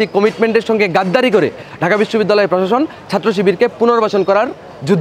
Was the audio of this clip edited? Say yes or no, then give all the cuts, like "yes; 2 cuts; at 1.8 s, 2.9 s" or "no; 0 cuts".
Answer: no; 0 cuts